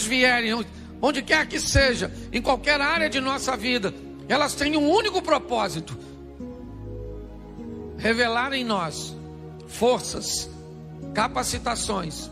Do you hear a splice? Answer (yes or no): yes